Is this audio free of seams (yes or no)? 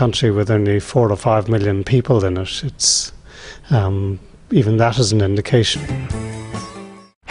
yes